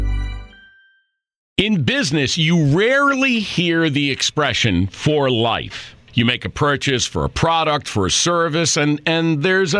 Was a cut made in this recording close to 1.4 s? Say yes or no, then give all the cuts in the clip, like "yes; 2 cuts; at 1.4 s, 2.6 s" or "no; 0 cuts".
yes; 1 cut; at 1.4 s